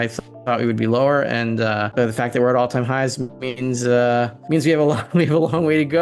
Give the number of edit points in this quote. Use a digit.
2